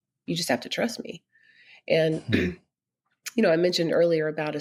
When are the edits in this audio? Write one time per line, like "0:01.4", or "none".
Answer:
none